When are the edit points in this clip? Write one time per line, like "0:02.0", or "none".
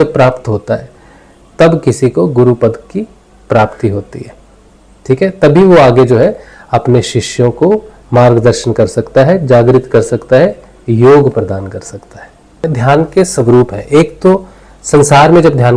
0:12.7